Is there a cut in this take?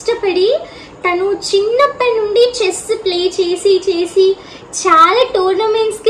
no; 0 cuts

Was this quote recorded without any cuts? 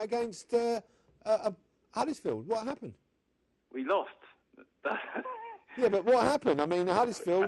no; 1 cut; at 3.0 s

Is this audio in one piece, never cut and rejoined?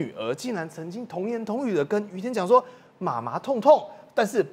yes; 0 cuts

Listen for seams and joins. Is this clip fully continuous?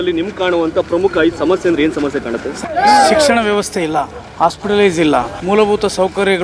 no; 3 cuts; at 2.4 s, 4.2 s, 5.3 s

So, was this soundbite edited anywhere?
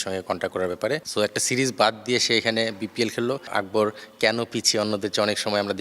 yes; 2 cuts; at 1.1 s, 3.5 s

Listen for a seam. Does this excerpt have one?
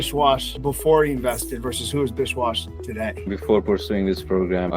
yes; 1 cut; at 3.3 s

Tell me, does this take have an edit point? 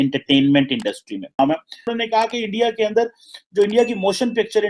yes; 1 cut; at 1.4 s

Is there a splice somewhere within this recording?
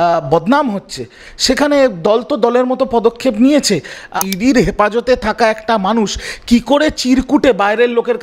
yes; 1 cut; at 4.2 s

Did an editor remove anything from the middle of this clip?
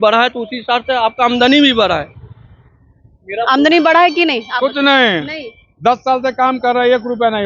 no; 0 cuts

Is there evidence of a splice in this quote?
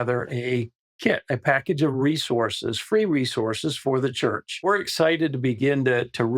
yes; 1 cut; at 4.5 s

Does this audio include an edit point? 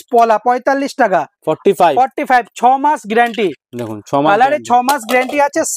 no; 0 cuts

